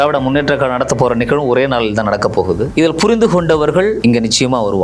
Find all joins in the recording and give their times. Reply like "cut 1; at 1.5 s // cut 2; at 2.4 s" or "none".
cut 1; at 2.7 s // cut 2; at 4.0 s